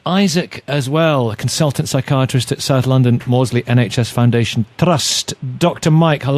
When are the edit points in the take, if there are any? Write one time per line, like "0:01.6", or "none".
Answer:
0:02.6